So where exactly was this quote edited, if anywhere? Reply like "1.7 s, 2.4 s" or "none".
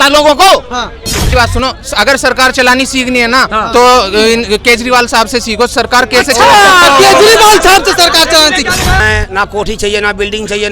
1.3 s, 9.0 s

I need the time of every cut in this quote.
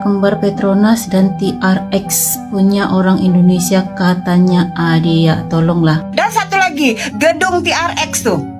6.1 s

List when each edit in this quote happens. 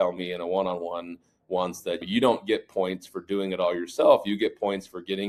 none

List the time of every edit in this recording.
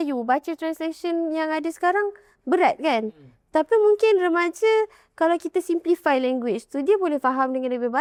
none

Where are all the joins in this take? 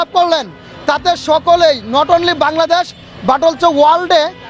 none

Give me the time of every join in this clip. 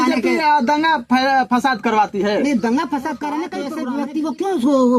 3.6 s

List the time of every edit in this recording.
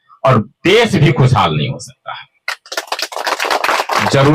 none

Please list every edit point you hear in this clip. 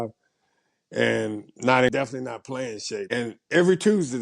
1.9 s, 3.1 s

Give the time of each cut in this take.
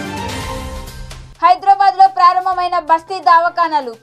1.3 s

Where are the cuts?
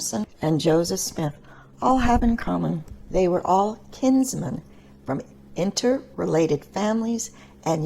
2.9 s

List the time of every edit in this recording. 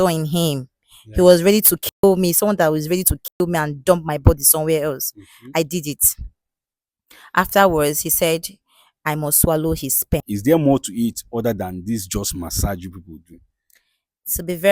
10.3 s

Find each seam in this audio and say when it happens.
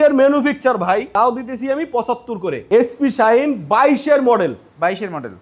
1.1 s, 2.5 s

